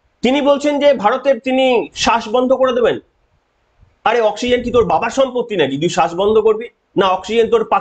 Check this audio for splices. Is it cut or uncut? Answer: uncut